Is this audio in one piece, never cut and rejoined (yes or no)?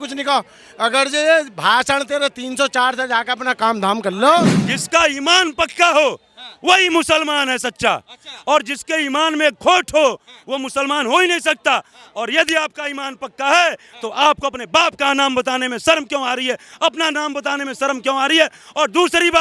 no